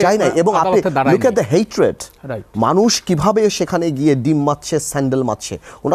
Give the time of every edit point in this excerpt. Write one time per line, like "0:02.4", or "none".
none